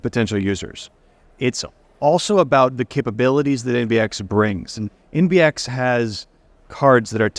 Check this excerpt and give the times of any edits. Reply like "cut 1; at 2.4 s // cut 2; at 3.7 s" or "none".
none